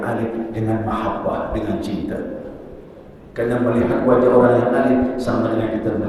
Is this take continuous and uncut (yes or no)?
yes